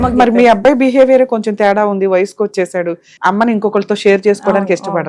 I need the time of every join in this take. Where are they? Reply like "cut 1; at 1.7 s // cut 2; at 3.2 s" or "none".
cut 1; at 3.1 s